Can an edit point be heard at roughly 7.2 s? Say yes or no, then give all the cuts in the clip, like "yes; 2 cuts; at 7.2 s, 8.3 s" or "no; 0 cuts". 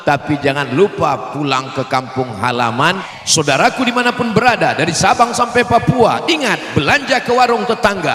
no; 1 cut; at 3.1 s